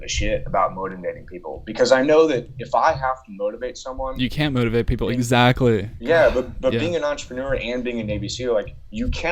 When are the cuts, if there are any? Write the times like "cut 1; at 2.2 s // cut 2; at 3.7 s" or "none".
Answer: none